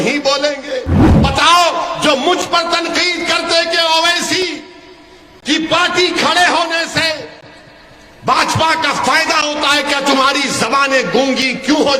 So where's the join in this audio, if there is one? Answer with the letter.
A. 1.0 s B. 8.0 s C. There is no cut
A